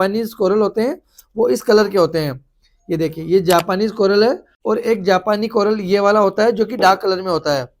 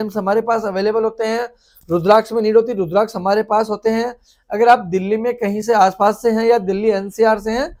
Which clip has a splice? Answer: first; 1 cut; at 4.5 s

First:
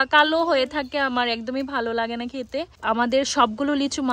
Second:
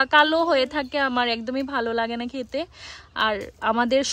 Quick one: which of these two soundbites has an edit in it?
first; 1 cut; at 2.7 s

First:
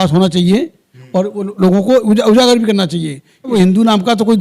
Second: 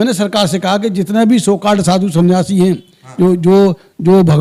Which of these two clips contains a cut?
first; 1 cut; at 3.5 s

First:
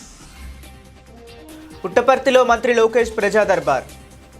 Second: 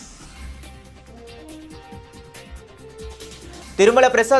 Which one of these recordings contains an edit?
first; 1 cut; at 1.3 s

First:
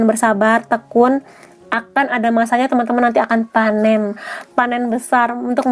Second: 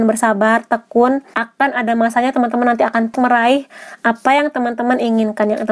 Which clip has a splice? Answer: second; 2 cuts; at 1.4 s, 3.2 s

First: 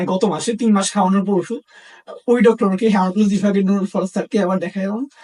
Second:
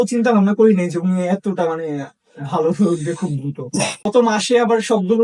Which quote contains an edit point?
second; 1 cut; at 4.0 s

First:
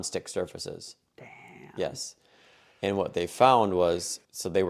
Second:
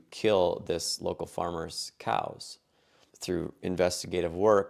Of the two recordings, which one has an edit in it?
second; 1 cut; at 2.9 s

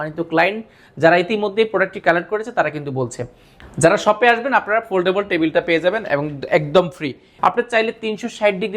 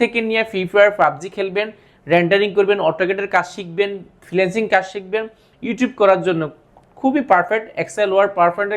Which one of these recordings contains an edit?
first; 2 cuts; at 3.5 s, 7.2 s

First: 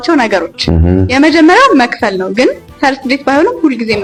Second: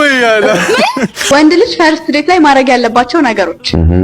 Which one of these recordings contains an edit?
second; 1 cut; at 1.2 s

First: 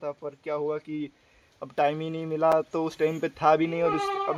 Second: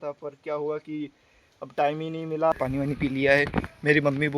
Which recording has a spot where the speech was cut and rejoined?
second; 1 cut; at 2.5 s

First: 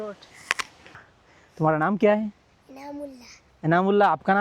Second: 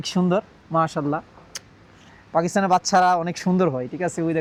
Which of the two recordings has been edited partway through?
first; 1 cut; at 1.0 s

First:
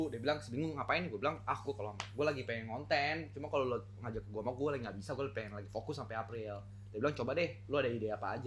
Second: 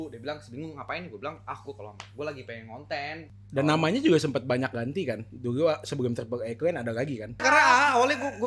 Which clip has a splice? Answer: second; 2 cuts; at 3.3 s, 7.4 s

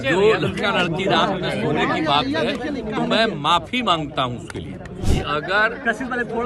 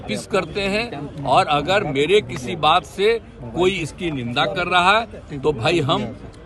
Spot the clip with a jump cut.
first; 1 cut; at 5.1 s

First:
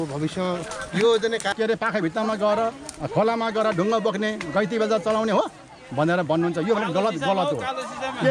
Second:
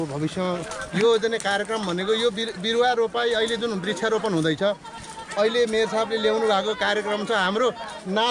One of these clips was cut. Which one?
first; 1 cut; at 1.5 s

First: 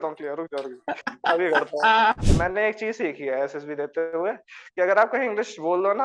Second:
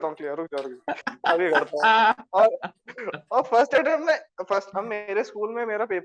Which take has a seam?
first; 1 cut; at 2.2 s

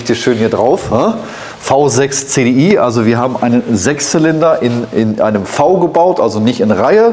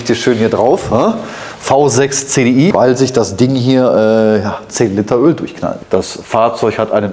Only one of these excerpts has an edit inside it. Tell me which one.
second; 2 cuts; at 2.7 s, 5.7 s

